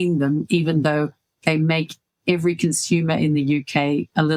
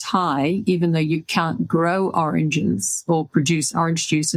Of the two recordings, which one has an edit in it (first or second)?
first